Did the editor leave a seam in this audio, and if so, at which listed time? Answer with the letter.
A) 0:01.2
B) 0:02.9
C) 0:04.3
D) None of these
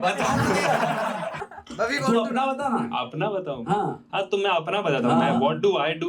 A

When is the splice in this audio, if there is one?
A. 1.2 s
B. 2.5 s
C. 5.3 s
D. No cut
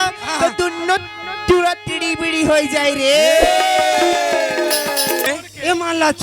C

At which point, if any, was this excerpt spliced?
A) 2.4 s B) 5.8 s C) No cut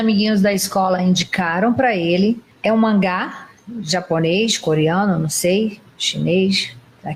C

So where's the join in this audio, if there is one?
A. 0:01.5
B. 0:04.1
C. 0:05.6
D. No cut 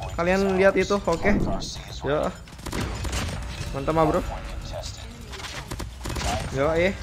A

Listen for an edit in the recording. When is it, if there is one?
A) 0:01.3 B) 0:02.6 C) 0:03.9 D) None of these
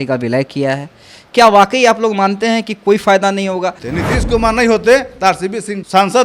C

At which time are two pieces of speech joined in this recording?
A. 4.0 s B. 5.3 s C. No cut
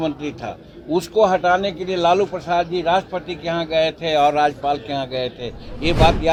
C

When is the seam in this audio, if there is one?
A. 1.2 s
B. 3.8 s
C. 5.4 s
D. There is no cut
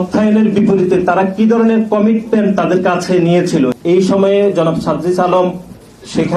B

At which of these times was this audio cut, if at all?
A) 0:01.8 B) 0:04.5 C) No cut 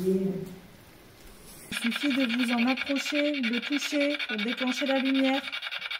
A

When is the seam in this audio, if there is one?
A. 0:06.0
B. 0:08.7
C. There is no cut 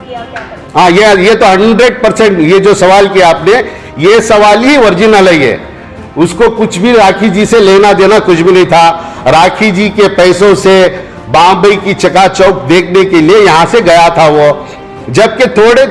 C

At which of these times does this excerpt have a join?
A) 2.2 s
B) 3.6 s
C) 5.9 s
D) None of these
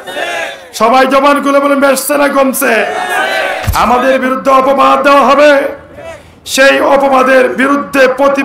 B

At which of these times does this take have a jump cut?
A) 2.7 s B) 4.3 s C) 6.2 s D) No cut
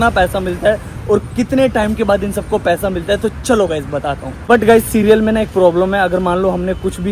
B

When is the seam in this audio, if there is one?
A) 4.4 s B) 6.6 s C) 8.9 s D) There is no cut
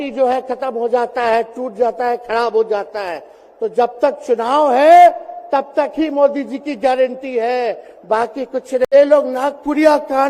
C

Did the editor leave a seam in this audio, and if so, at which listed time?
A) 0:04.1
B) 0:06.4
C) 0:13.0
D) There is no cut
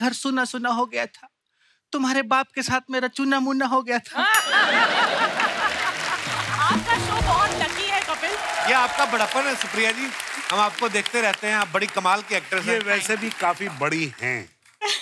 B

